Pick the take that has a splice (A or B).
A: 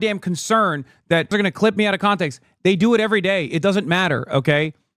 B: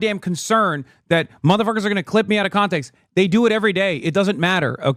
A